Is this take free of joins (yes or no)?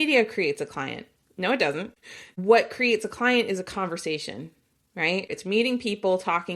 no